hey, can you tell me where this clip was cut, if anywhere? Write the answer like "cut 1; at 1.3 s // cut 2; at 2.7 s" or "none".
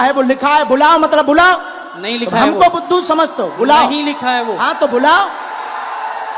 none